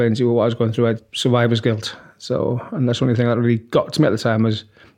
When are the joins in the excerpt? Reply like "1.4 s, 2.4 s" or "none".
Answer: 1.0 s